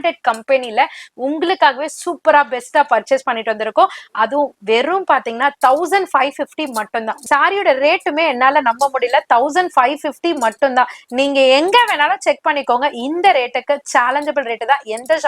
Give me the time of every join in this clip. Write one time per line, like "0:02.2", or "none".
0:07.1